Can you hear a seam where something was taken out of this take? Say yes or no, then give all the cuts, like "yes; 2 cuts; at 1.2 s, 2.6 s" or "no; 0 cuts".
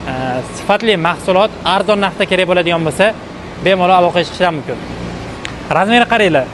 no; 0 cuts